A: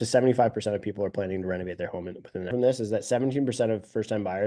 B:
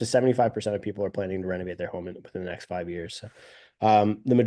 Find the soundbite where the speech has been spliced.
A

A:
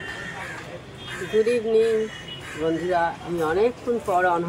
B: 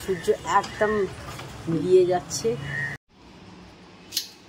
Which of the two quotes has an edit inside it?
B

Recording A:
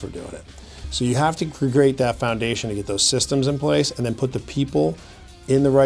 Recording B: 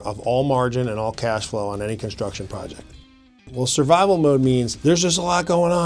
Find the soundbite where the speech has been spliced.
B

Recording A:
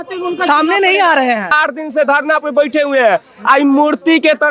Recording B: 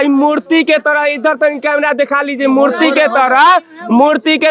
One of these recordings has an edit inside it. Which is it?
A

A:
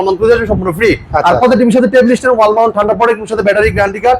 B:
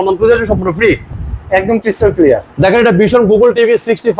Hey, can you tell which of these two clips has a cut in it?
B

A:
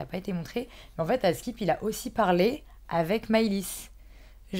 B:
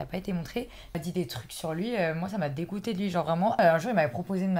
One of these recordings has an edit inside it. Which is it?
B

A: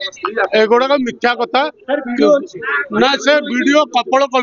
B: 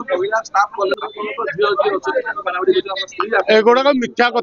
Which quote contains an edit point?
B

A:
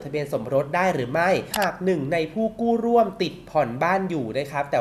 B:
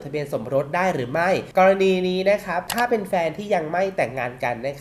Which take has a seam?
A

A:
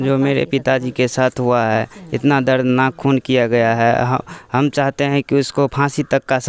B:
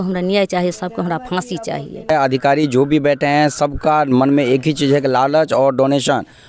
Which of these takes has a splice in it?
B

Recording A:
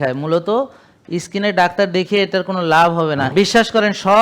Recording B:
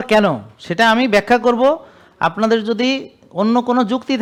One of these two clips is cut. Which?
A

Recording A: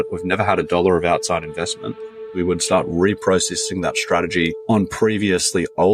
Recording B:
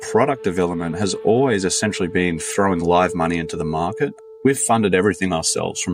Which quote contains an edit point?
A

